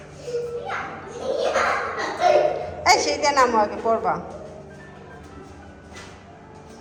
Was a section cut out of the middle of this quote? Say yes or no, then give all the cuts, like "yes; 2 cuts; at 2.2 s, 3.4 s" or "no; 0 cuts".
no; 0 cuts